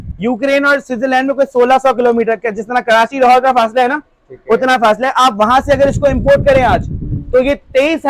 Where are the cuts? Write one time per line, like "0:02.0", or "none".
none